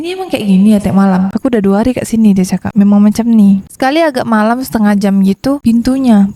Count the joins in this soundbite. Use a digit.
0